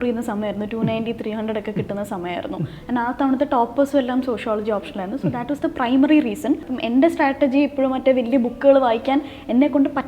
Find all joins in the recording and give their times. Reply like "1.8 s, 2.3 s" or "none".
6.7 s